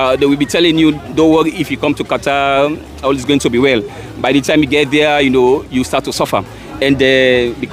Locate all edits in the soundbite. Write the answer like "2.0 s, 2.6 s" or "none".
none